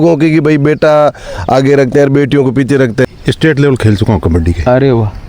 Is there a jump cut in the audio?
yes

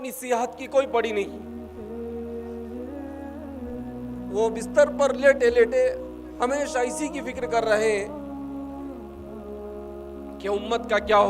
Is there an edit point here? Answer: no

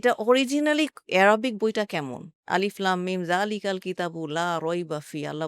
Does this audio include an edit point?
yes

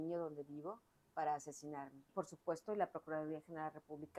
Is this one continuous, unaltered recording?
no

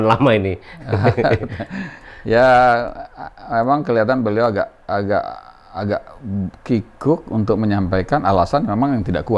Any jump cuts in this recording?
no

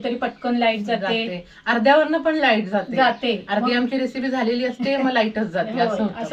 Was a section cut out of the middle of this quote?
no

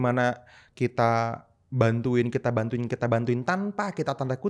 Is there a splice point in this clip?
no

